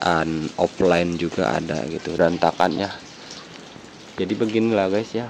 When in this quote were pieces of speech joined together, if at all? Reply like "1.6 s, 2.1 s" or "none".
2.1 s